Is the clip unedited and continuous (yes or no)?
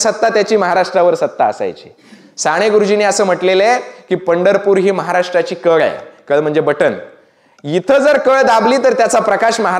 yes